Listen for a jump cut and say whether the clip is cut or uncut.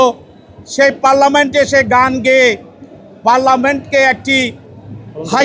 uncut